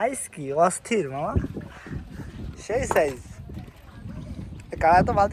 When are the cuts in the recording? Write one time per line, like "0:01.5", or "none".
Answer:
none

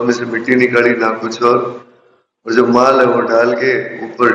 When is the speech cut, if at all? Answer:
none

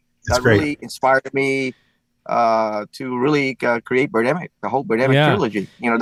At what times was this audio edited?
none

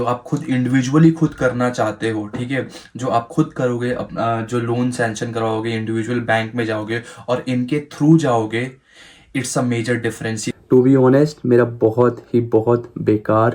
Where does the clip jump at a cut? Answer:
0:10.5

